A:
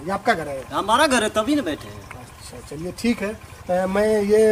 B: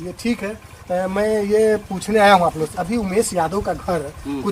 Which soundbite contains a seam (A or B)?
B